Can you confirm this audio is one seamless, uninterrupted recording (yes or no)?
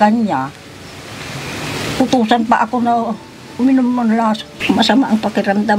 no